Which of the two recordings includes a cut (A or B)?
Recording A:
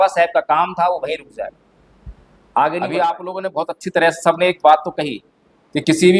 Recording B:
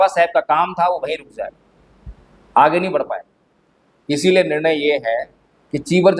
A